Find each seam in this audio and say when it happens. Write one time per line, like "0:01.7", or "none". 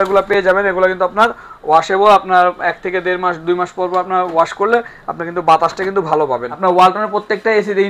0:06.5

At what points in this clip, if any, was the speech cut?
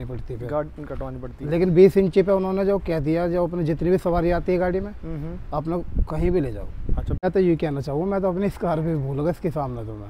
0:07.2

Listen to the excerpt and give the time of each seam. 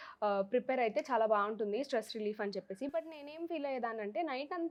none

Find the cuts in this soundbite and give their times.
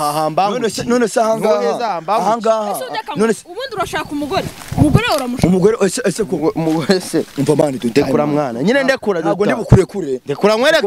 none

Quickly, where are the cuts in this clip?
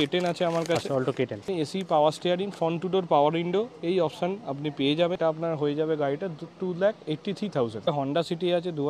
0:01.4
0:05.2
0:07.9

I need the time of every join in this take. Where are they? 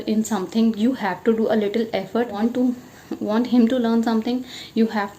0:02.3

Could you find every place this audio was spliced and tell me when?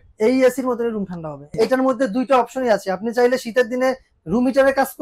0:01.4

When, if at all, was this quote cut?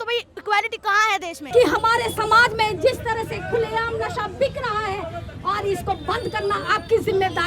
0:01.4

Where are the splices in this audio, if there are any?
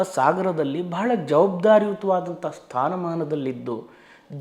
none

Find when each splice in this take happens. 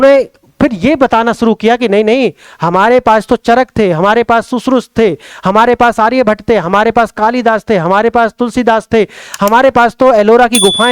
none

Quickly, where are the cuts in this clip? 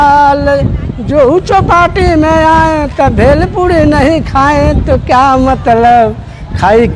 none

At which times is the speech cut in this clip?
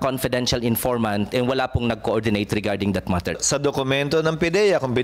0:03.4

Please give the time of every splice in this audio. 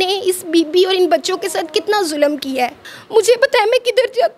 0:02.9

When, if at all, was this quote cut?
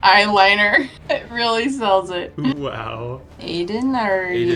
0:01.0
0:03.4

